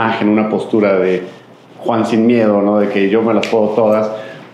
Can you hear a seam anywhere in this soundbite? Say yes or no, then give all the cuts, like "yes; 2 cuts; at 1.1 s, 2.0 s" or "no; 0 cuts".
no; 0 cuts